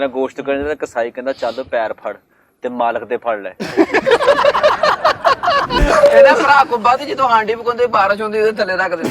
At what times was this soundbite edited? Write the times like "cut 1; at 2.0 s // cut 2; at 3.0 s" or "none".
cut 1; at 5.7 s

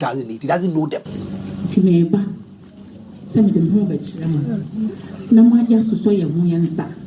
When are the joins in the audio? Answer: cut 1; at 1.1 s

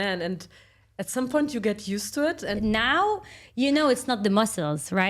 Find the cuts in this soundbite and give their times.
cut 1; at 2.6 s

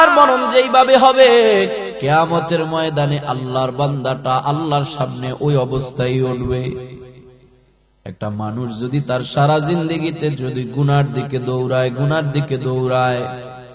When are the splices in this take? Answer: cut 1; at 1.9 s

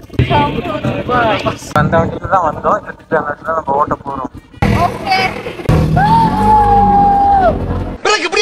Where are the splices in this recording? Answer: none

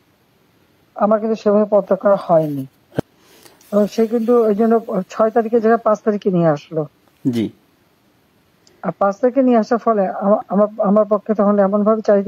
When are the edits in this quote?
cut 1; at 3.0 s

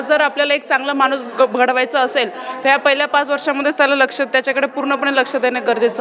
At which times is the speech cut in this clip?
none

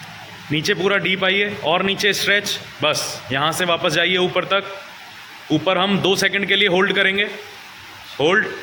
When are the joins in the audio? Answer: none

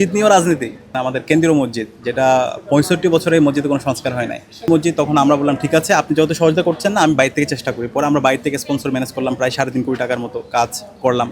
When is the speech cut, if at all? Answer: cut 1; at 0.9 s // cut 2; at 4.7 s

